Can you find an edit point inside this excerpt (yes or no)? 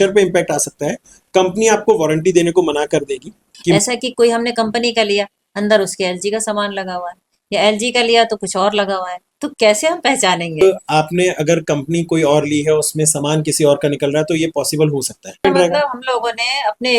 yes